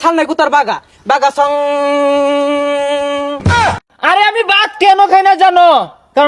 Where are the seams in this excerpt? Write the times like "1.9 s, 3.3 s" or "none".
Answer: 3.6 s